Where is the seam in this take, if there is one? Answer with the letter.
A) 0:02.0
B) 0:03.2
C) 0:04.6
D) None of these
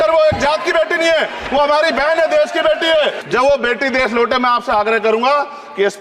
B